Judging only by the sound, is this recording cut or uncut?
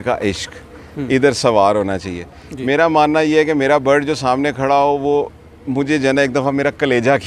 uncut